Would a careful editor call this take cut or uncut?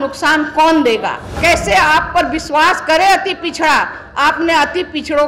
cut